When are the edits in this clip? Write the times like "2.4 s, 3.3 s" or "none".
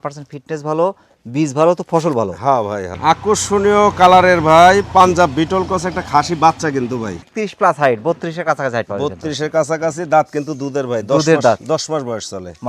2.9 s, 7.1 s